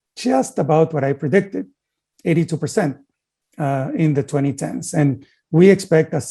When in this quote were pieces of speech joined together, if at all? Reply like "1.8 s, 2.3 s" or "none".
none